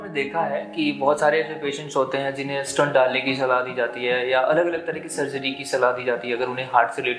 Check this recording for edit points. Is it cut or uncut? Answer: uncut